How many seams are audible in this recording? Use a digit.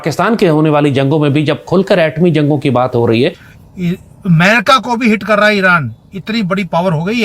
1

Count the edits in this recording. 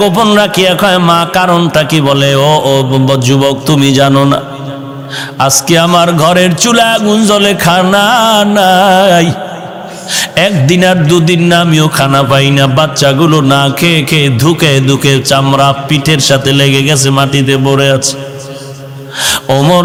0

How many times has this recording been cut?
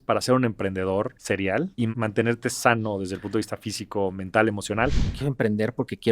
2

